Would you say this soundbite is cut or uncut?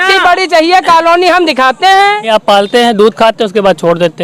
cut